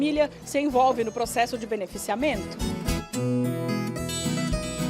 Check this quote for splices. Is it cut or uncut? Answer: cut